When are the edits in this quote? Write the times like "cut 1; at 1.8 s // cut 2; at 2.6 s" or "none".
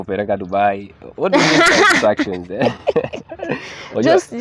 none